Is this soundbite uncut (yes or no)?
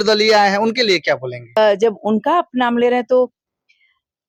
yes